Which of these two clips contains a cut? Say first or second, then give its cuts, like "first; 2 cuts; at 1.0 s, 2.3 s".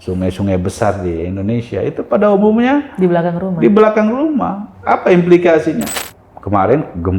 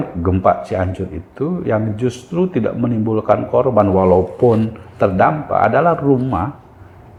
first; 1 cut; at 5.9 s